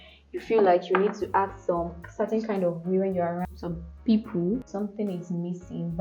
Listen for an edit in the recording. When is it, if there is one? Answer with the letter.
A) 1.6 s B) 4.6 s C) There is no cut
B